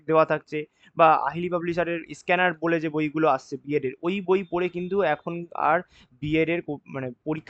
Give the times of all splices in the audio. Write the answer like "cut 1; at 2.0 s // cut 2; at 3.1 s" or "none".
none